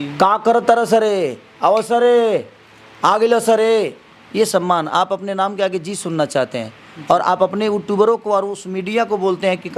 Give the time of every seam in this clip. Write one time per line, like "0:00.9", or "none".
none